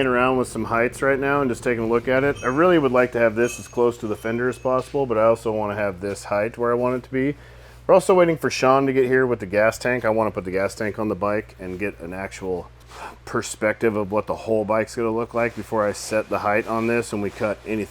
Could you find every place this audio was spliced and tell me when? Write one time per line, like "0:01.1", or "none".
none

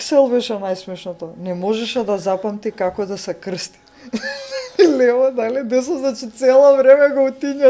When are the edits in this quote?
none

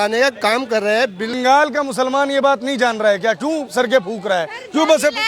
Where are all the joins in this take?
0:01.3

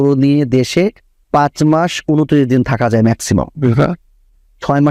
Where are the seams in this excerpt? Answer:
none

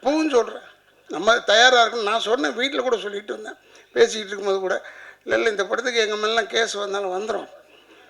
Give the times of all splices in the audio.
none

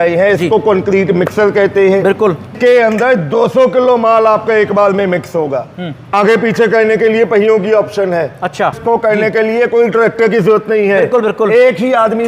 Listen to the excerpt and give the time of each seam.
0:02.5
0:06.1
0:08.8

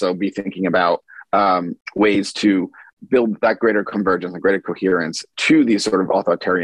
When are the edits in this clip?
0:01.8
0:02.8

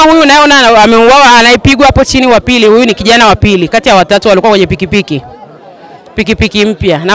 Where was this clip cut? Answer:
none

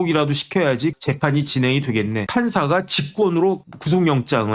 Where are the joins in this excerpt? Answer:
0:01.0
0:02.2

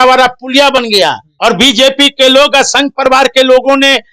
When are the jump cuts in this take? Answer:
0:01.3

